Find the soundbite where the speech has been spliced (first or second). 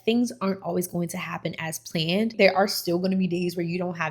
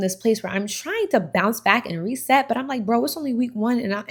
first